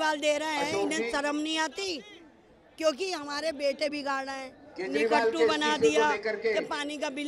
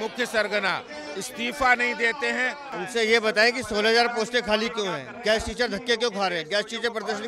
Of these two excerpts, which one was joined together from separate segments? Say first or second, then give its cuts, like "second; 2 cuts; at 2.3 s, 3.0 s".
second; 1 cut; at 2.6 s